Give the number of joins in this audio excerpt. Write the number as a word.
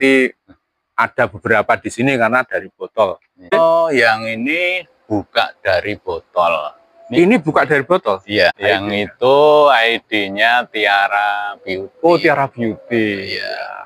two